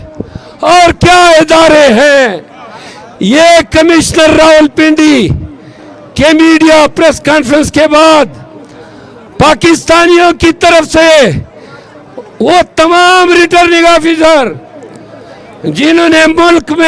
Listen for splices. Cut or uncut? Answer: uncut